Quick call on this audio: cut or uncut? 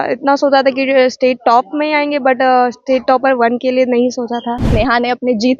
cut